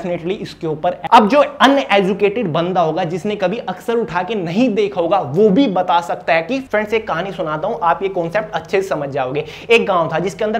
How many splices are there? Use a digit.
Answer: 2